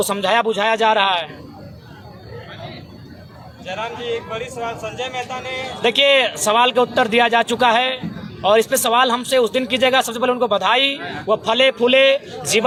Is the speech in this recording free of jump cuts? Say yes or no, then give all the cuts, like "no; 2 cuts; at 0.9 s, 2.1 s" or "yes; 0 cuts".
yes; 0 cuts